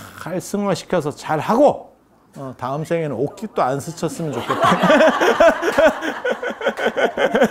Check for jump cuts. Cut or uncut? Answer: uncut